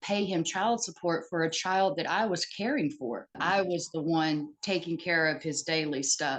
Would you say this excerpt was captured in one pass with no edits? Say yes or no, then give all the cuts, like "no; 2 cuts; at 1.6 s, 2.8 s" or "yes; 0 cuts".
no; 1 cut; at 3.4 s